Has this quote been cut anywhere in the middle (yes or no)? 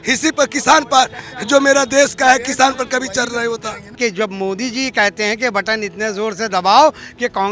yes